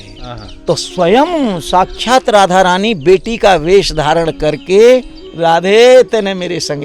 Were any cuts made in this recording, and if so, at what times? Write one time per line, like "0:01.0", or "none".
0:05.2